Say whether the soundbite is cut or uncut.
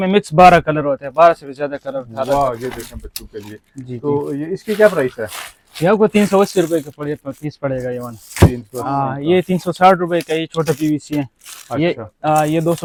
uncut